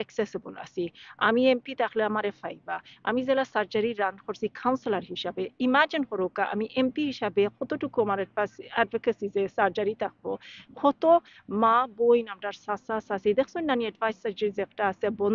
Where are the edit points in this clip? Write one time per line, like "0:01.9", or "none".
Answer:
none